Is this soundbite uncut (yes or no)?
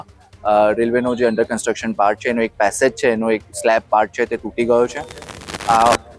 yes